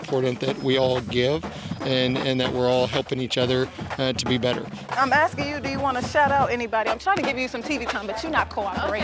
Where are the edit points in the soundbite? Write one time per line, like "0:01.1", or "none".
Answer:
0:04.8

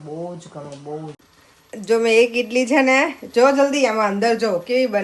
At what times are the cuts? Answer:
0:01.3

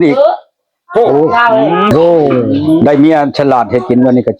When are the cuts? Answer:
0:01.9

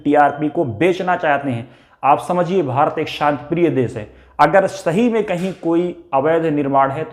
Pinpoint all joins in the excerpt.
none

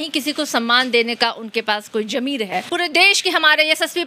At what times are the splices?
0:02.7

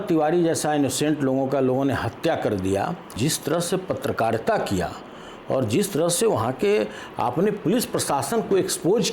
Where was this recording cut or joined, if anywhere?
0:03.2

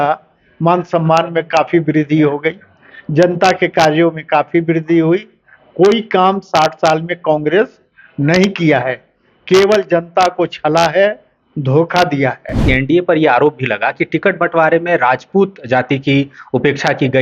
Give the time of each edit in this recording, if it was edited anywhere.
0:12.6

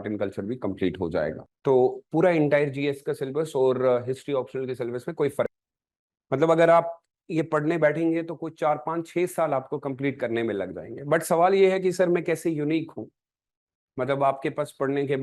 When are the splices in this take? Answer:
0:01.5
0:05.5

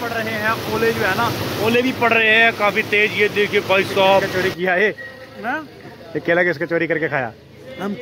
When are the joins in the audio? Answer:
0:04.3

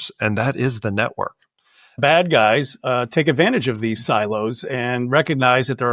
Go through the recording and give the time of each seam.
0:02.0

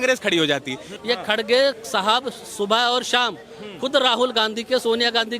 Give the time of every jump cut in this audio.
0:00.9

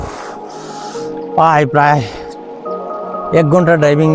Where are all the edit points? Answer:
none

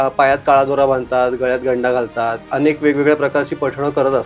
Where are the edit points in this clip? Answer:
0:02.4

